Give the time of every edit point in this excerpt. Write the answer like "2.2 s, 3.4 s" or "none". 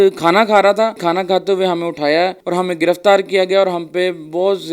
1.0 s, 2.4 s